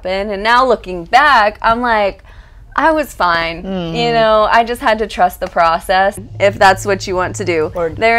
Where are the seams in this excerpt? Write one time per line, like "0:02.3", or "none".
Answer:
0:06.2